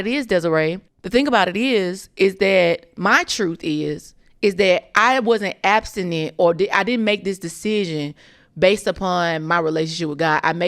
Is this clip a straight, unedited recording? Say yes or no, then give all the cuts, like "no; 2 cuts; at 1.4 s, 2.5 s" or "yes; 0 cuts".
no; 1 cut; at 0.9 s